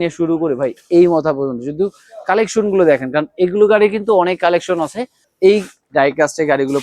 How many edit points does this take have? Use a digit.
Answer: 1